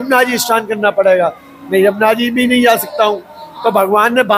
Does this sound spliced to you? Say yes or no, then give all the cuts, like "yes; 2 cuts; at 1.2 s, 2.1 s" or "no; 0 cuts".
no; 0 cuts